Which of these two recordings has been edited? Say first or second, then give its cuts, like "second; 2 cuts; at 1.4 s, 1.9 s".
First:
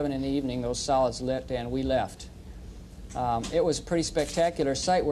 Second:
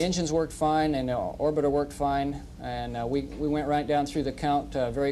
second; 1 cut; at 1.6 s